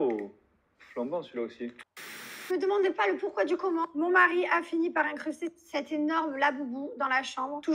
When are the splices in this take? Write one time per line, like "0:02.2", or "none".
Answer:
0:01.9